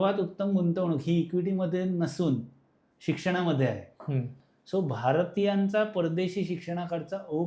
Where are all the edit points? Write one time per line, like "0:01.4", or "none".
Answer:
0:04.3